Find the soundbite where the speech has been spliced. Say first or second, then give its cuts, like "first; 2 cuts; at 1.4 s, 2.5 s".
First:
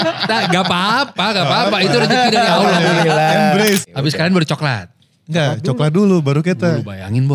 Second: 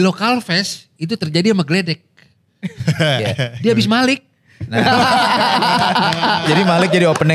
first; 1 cut; at 3.9 s